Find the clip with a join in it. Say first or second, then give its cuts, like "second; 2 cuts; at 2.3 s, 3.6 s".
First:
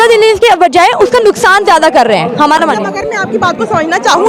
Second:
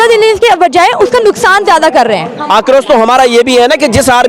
second; 1 cut; at 2.3 s